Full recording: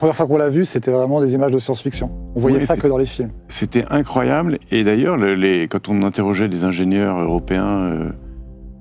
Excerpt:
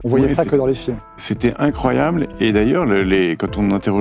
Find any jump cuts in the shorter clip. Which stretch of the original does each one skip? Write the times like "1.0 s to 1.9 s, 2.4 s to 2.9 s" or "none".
none

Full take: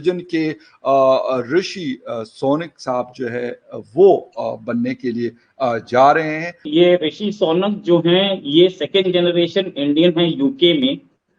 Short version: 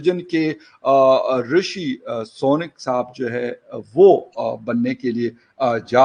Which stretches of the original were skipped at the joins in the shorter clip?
none

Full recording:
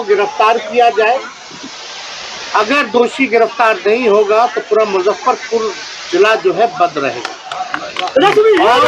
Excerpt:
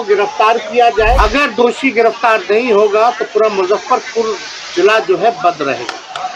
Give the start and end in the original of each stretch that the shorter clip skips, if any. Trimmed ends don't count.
1.2 s to 2.5 s

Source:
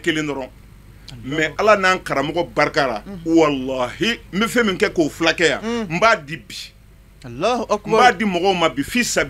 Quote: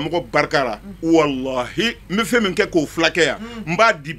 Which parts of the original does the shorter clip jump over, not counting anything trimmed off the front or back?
none

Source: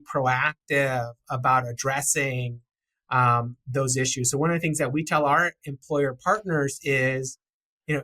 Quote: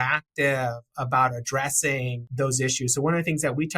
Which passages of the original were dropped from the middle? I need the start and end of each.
2.5 s to 3.6 s

